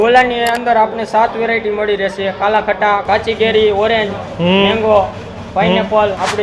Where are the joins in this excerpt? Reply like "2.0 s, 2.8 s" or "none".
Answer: none